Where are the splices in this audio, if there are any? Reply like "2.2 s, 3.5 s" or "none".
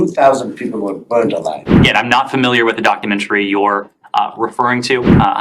1.8 s